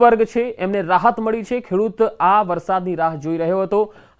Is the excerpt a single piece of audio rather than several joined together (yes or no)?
no